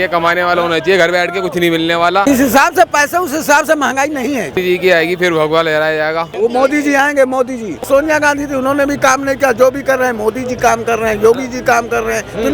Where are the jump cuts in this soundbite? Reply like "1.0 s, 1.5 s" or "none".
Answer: 2.3 s, 4.6 s, 6.3 s, 7.8 s